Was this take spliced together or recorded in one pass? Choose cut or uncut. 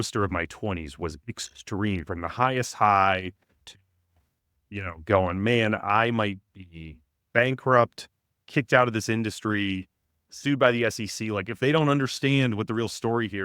uncut